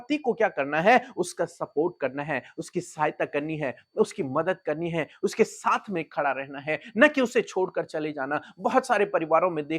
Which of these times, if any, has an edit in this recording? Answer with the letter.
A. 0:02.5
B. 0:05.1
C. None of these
C